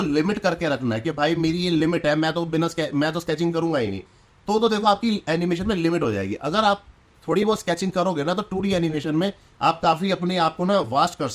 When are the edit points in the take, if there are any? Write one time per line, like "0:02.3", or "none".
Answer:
none